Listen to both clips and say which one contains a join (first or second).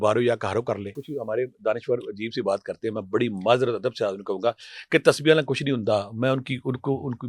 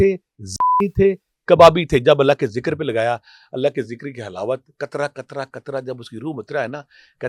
first